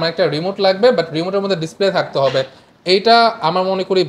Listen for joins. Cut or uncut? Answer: uncut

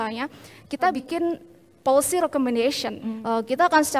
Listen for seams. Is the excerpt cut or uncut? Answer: cut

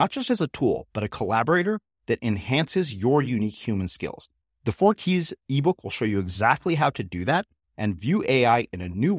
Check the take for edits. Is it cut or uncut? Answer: uncut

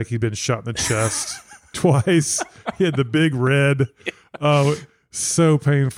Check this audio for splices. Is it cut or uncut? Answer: uncut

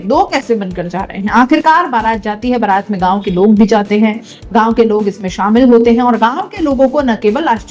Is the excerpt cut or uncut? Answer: uncut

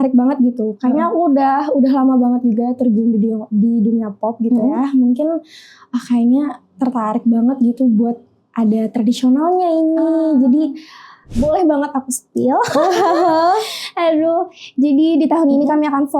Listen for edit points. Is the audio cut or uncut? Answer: cut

